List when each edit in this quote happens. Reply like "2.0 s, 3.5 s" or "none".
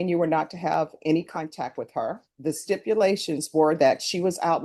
2.3 s